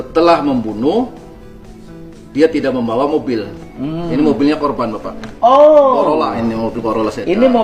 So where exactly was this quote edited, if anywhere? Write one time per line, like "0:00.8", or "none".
none